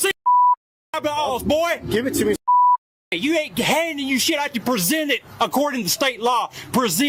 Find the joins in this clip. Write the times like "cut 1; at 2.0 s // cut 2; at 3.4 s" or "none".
none